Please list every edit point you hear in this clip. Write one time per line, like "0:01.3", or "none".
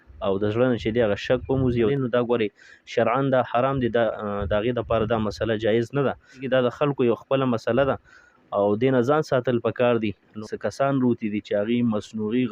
0:01.9
0:06.4
0:10.3